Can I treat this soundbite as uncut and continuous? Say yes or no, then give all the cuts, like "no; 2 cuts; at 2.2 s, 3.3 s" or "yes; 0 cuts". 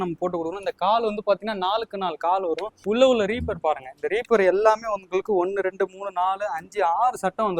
yes; 0 cuts